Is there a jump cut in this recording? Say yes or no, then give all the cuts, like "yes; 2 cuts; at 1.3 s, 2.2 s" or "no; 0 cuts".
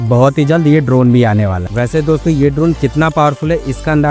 yes; 1 cut; at 1.6 s